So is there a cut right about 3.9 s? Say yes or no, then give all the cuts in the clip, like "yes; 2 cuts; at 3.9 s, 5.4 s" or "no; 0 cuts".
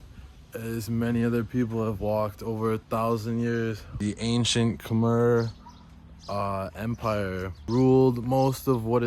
yes; 2 cuts; at 3.9 s, 7.6 s